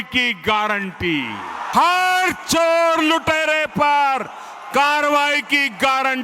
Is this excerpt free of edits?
no; 1 cut; at 1.7 s

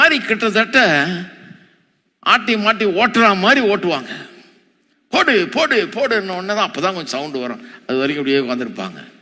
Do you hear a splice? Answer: no; 0 cuts

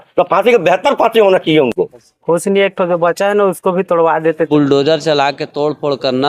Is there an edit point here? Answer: yes; 2 cuts; at 2.1 s, 4.5 s

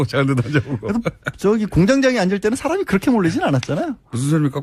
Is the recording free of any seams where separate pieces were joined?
no; 1 cut; at 3.5 s

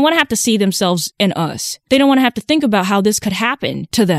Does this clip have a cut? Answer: yes; 1 cut; at 1.3 s

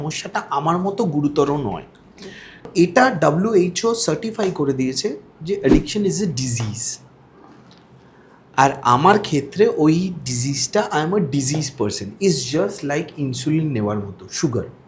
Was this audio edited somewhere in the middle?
no; 0 cuts

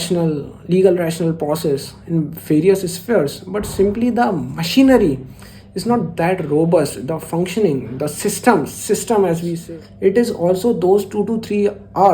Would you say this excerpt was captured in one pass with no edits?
no; 1 cut; at 9.6 s

